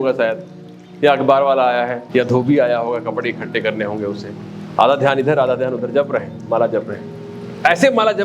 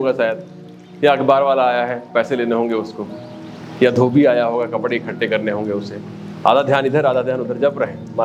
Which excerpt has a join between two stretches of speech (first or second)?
first